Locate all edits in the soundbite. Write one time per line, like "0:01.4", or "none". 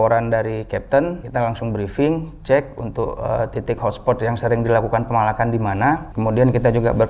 0:01.2
0:06.1